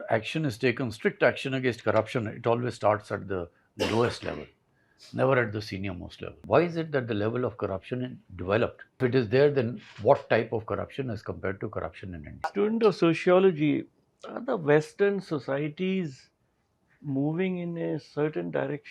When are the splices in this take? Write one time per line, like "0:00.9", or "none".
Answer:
0:06.4
0:09.0
0:12.5